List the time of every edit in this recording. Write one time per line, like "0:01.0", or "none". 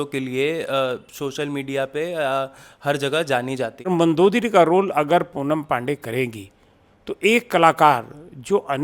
0:03.9